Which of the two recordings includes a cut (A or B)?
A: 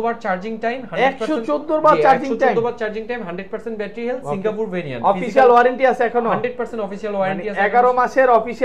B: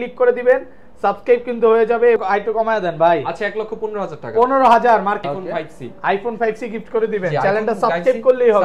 B